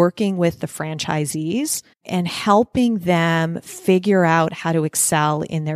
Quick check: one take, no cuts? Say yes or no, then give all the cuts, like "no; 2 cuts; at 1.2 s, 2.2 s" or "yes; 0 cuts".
no; 1 cut; at 2.0 s